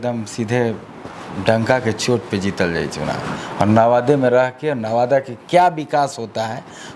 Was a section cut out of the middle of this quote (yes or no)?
no